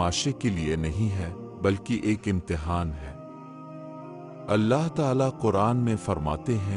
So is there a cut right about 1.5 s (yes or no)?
no